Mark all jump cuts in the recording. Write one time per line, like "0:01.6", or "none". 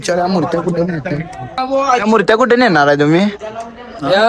0:01.6